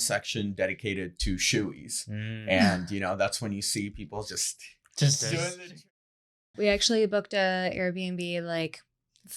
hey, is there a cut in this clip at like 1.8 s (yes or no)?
no